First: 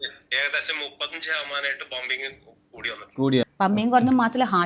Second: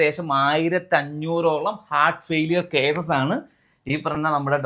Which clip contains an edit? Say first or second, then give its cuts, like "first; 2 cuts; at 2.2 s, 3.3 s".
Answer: first; 1 cut; at 3.5 s